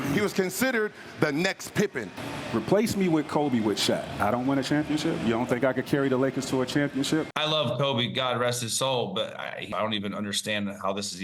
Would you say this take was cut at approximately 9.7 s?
yes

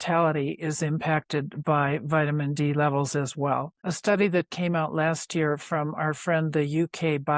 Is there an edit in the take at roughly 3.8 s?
yes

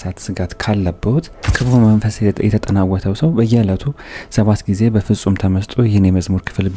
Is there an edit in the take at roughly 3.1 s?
no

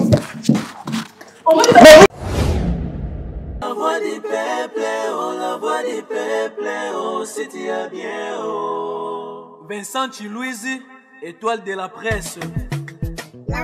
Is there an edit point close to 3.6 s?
yes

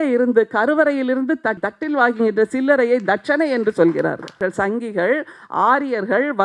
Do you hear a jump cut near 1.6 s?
yes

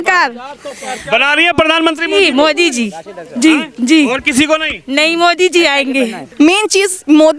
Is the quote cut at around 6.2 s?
yes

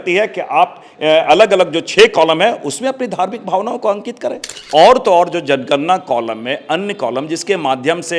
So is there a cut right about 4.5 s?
yes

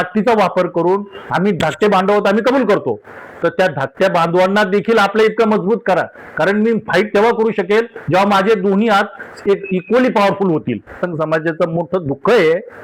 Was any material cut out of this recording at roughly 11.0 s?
yes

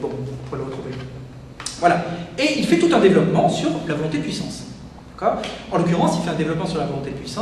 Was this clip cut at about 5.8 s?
no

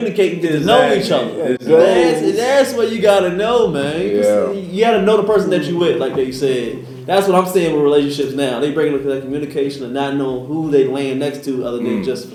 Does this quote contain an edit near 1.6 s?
no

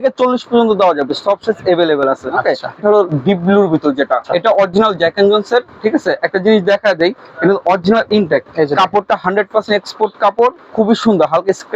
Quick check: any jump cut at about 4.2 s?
yes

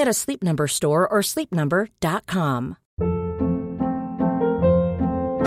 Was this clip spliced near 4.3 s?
no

